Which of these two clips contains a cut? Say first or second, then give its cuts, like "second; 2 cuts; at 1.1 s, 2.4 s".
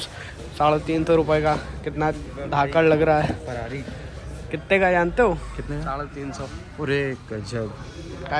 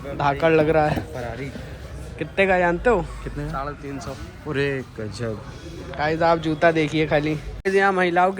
second; 1 cut; at 7.5 s